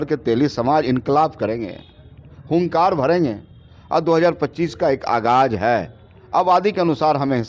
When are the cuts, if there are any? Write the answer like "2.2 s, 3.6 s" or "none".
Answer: none

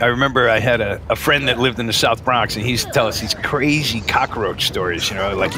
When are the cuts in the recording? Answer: 1.0 s

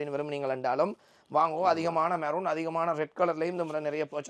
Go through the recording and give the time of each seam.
none

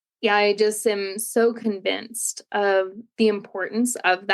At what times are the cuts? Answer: 3.0 s

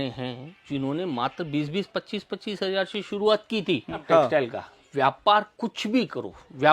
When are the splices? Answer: 4.0 s

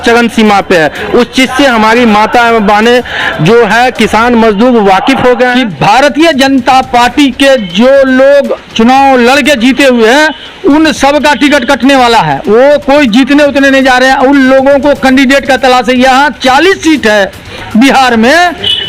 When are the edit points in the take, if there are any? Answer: 5.5 s

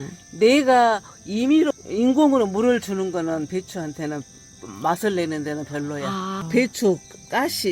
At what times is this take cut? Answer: 1.7 s, 6.4 s

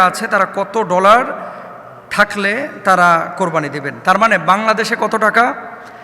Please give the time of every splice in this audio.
none

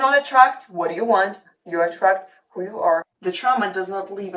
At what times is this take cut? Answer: 3.1 s

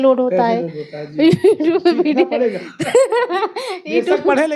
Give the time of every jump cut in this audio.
none

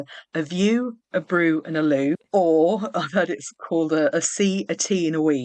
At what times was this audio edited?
2.2 s

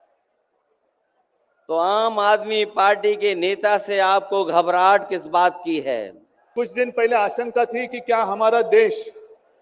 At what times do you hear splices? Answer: 6.4 s

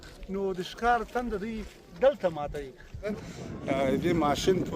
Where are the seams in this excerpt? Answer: 3.2 s

